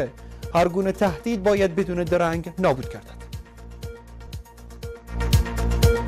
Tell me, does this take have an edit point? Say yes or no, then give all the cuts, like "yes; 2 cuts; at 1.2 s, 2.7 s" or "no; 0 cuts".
no; 0 cuts